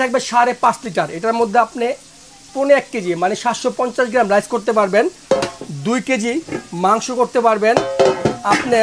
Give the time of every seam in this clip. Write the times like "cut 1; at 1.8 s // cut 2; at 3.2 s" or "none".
none